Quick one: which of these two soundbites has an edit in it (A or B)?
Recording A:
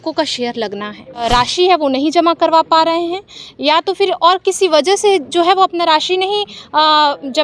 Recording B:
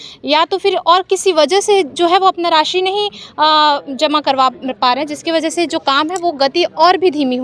A